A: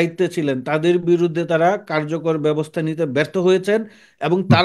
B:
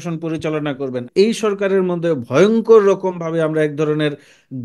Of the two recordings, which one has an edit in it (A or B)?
B